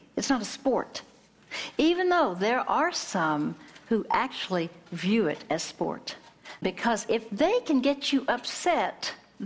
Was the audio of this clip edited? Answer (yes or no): yes